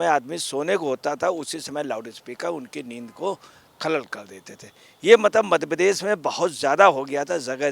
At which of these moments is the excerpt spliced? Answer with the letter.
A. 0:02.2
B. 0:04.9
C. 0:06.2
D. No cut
D